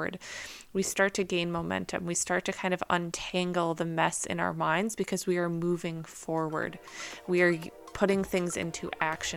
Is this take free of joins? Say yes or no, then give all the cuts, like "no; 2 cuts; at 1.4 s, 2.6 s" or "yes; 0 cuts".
yes; 0 cuts